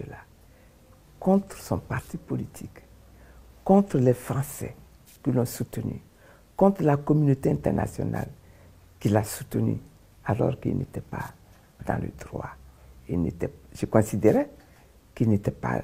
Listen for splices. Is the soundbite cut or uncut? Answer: uncut